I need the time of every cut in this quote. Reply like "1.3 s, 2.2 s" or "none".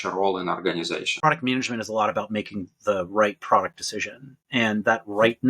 1.1 s